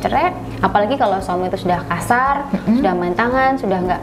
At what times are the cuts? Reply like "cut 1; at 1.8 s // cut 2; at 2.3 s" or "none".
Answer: none